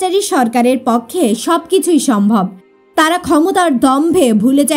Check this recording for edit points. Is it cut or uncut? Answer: uncut